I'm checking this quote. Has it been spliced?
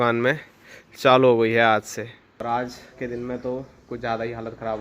yes; 1 cut; at 2.4 s

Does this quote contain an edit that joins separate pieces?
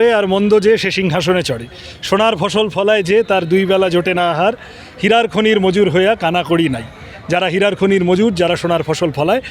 no; 0 cuts

